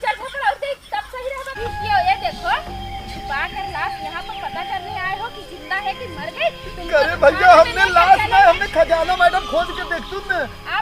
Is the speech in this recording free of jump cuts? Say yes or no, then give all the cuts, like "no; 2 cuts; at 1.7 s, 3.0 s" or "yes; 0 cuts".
no; 1 cut; at 1.6 s